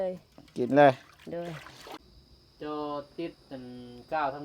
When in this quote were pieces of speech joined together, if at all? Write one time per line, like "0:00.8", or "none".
0:02.2